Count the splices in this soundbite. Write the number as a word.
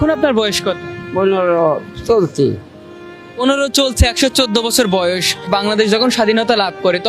two